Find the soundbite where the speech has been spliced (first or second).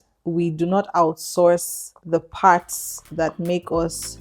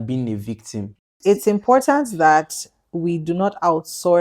second